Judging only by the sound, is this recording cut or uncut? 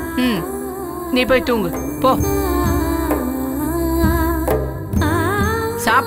uncut